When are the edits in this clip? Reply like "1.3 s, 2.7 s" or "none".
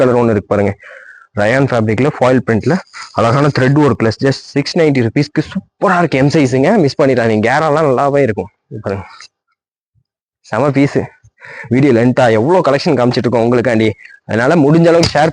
none